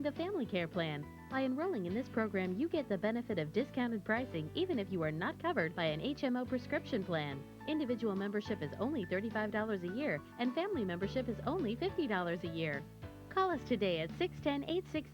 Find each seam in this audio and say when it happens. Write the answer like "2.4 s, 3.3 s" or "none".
none

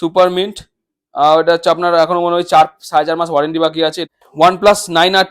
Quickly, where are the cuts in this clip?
4.0 s

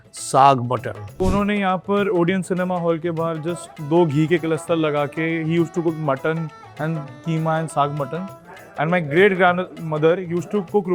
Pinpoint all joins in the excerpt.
1.2 s, 3.7 s

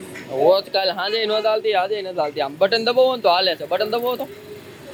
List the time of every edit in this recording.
none

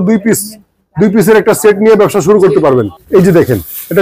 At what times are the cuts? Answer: 3.0 s

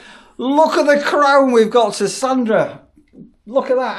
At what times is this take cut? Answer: none

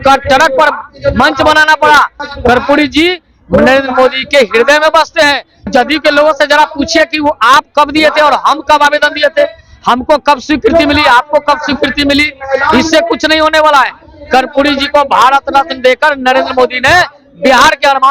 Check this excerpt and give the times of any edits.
2.2 s, 5.7 s

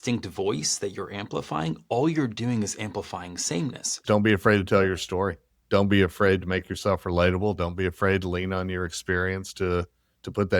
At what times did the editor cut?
4.0 s

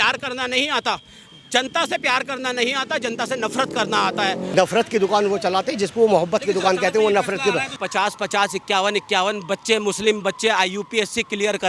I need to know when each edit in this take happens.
4.5 s, 7.8 s

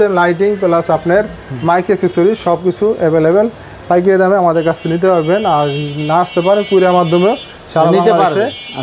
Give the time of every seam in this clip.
none

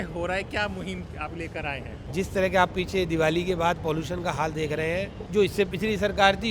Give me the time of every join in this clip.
2.0 s, 5.2 s

